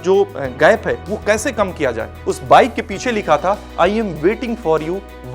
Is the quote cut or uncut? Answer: cut